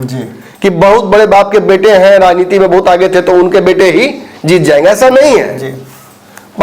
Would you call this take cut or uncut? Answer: uncut